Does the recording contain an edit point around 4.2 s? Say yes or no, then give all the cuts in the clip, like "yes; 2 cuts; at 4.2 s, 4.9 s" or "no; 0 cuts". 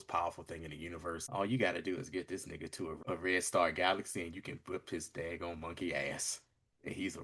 no; 2 cuts; at 1.2 s, 3.0 s